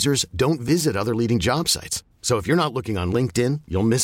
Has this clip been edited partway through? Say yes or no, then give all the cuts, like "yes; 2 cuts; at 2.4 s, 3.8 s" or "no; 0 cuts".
no; 0 cuts